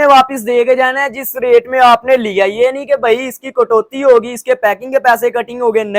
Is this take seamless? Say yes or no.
yes